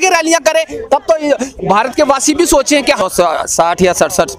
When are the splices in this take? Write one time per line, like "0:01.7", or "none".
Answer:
0:03.0